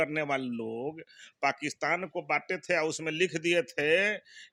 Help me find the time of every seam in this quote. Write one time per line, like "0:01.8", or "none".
none